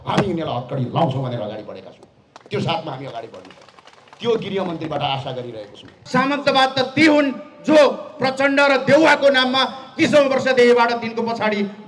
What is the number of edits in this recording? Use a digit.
1